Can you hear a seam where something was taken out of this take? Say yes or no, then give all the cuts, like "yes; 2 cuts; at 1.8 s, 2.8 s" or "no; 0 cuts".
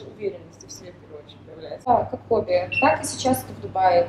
yes; 1 cut; at 1.9 s